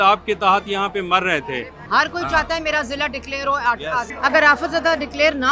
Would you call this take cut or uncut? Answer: cut